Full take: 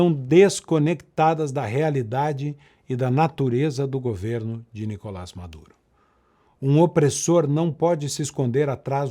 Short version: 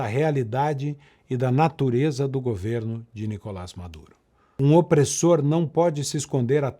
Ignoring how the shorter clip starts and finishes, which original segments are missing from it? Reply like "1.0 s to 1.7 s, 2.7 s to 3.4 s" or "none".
6.2 s to 6.6 s